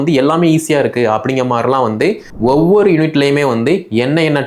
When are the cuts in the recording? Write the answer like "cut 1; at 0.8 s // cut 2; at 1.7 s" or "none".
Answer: cut 1; at 2.3 s